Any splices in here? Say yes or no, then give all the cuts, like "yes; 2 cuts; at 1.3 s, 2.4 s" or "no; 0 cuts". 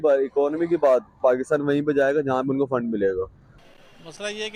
yes; 1 cut; at 3.4 s